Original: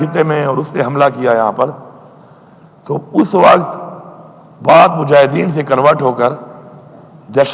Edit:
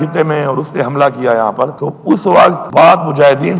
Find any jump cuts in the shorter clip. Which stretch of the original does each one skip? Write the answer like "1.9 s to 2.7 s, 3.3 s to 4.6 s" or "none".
1.8 s to 2.8 s, 3.7 s to 4.5 s